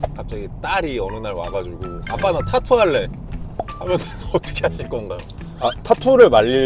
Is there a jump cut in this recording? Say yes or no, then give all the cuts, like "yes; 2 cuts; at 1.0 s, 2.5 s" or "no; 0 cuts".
no; 0 cuts